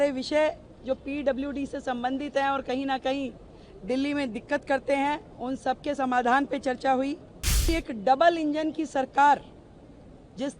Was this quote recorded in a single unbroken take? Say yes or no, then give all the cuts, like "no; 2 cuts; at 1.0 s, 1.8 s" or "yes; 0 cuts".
no; 1 cut; at 7.7 s